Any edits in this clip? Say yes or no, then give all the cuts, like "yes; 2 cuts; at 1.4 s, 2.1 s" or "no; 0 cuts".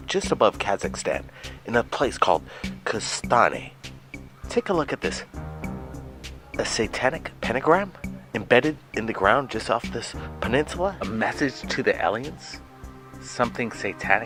no; 0 cuts